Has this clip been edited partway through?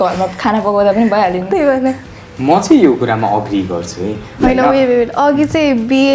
yes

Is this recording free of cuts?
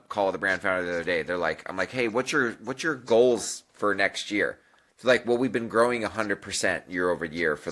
yes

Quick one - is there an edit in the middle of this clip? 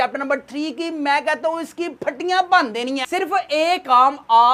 yes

